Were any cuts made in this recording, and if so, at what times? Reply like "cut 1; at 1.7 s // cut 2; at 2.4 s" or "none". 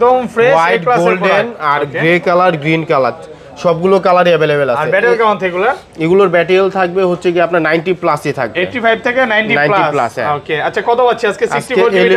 none